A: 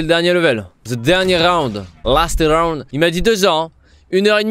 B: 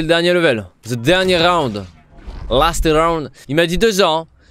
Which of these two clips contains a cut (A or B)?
A